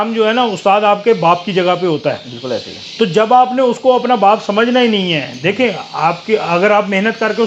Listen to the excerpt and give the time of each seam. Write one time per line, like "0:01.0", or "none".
none